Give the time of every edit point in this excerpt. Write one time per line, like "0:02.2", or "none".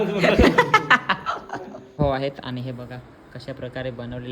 0:02.0

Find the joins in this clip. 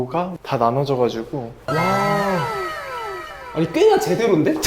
0:01.6

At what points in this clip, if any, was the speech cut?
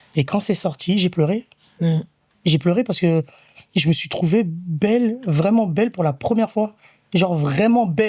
none

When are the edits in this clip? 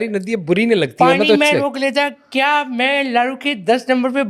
none

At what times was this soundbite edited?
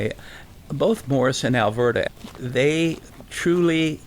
0:02.1
0:03.1

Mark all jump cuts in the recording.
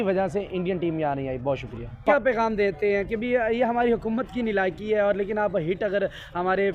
0:02.0

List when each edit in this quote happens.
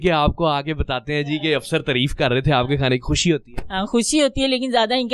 none

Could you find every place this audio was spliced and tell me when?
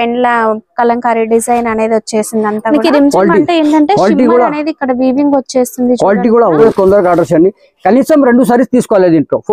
0:02.6
0:06.6

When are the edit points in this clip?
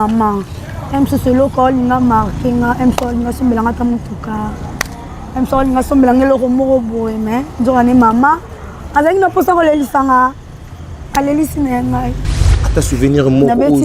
0:12.5

